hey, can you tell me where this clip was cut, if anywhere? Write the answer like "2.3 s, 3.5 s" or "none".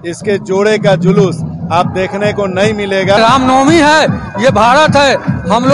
3.2 s